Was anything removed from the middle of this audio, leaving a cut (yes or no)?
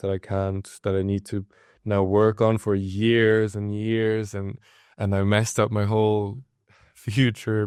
no